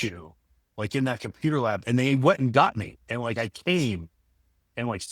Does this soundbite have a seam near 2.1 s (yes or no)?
no